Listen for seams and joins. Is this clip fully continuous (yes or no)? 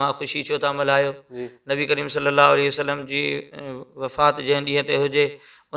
yes